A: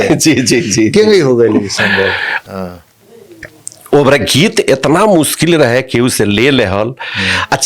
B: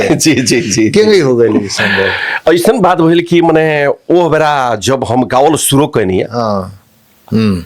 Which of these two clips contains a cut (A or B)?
A